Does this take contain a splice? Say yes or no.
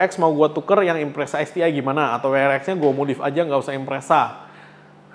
no